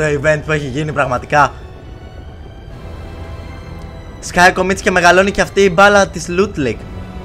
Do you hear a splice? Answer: no; 0 cuts

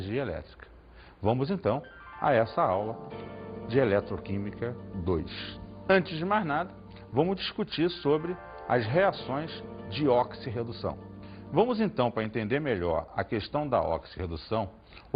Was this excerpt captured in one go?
yes; 0 cuts

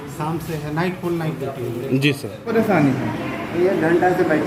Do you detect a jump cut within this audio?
yes; 1 cut; at 2.3 s

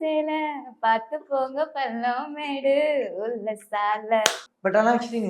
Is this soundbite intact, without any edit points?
no; 1 cut; at 4.4 s

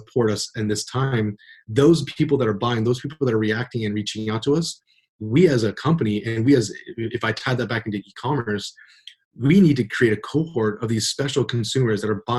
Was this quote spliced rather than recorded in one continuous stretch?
no; 0 cuts

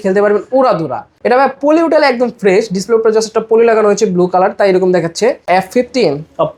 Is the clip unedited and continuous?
no; 2 cuts; at 1.1 s, 5.4 s

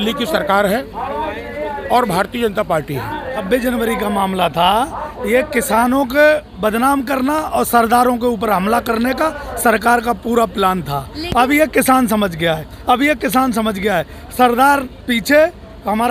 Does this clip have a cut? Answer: yes; 1 cut; at 3.3 s

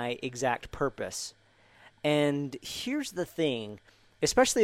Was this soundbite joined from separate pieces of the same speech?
no; 0 cuts

